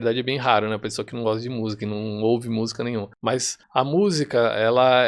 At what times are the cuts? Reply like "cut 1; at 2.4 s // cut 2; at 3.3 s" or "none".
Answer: cut 1; at 3.5 s